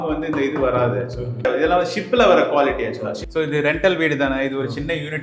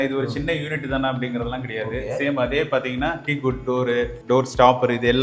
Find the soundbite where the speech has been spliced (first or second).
first